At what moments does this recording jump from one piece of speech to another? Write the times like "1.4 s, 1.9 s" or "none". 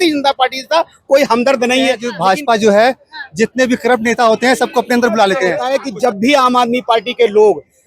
2.1 s, 5.7 s